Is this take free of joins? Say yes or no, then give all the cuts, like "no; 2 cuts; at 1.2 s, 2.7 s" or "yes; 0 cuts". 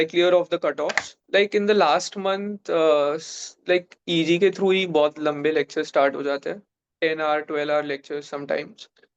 no; 1 cut; at 1.2 s